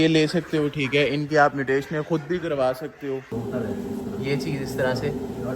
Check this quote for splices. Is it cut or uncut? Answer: cut